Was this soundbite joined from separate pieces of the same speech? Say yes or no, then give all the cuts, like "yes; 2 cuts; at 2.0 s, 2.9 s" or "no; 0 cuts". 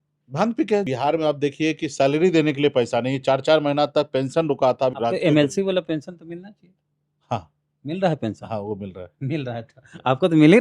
yes; 2 cuts; at 0.9 s, 5.0 s